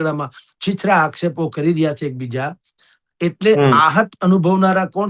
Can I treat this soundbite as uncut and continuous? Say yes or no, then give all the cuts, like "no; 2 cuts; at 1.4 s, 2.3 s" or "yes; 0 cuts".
yes; 0 cuts